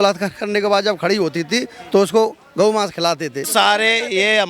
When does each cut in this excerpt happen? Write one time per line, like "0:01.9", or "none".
0:03.5